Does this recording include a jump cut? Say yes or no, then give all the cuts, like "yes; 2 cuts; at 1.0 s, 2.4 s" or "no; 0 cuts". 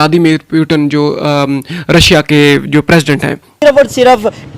yes; 1 cut; at 3.6 s